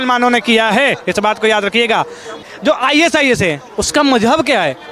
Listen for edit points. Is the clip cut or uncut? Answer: cut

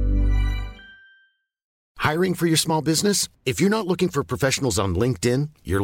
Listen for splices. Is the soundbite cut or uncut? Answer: cut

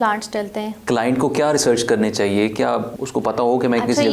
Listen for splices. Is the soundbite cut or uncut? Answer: cut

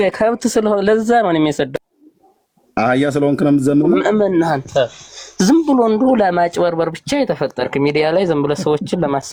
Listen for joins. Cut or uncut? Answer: uncut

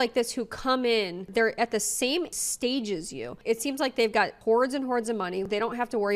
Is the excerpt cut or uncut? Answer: uncut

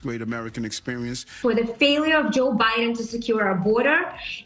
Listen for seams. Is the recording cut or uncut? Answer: cut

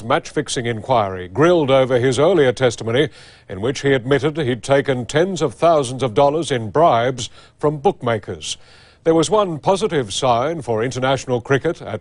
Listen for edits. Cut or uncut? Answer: cut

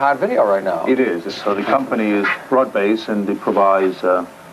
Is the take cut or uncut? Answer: cut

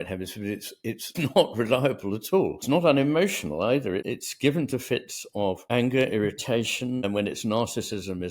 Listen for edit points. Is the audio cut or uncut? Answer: cut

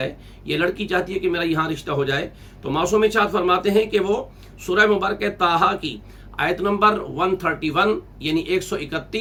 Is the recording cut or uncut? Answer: uncut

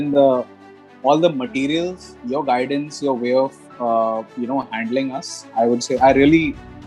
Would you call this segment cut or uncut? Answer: uncut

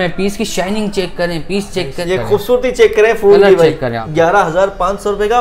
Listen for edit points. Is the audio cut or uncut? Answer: cut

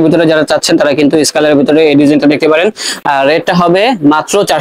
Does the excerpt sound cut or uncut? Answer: uncut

